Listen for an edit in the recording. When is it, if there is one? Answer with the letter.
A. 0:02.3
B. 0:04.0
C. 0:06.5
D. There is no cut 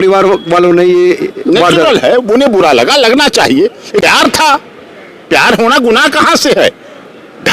B